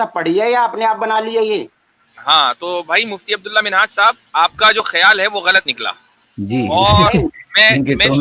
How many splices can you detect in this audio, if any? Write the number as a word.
one